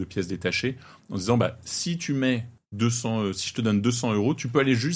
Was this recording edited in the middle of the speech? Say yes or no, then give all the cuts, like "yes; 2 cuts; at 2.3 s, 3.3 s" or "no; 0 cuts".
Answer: yes; 1 cut; at 2.6 s